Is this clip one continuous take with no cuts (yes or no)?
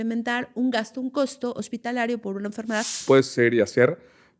no